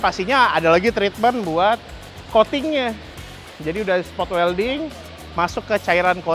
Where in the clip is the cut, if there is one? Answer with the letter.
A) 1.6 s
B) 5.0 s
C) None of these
C